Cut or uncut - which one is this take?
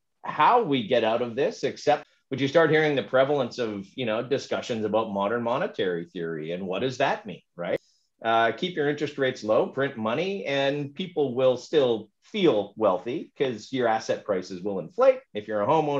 cut